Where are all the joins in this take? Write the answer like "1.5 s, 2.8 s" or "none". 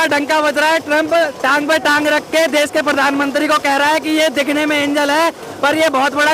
none